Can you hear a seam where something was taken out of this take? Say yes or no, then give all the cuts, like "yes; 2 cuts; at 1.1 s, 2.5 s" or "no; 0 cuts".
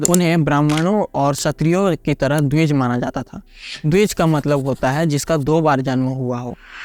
no; 0 cuts